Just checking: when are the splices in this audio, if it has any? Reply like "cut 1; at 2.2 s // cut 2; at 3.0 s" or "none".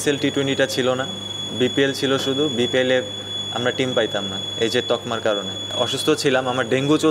cut 1; at 5.6 s